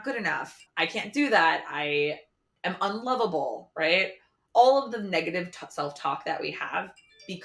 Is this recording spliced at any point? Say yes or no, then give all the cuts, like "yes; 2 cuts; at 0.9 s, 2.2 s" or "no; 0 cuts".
no; 0 cuts